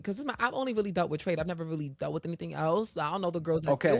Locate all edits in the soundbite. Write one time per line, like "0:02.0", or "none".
none